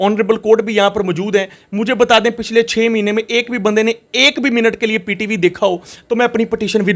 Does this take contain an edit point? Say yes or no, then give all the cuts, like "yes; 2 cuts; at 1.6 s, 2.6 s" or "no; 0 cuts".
no; 0 cuts